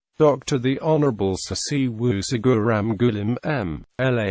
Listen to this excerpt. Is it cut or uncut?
cut